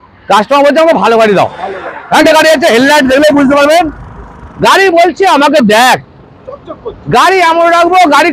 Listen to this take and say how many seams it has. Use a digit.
1